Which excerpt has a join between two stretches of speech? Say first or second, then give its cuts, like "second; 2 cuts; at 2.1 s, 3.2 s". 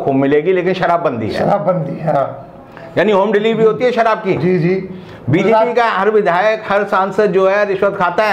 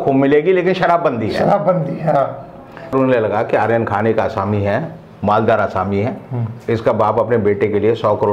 second; 1 cut; at 2.9 s